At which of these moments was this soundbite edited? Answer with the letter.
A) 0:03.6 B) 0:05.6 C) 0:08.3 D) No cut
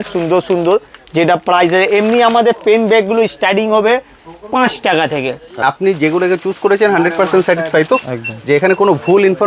B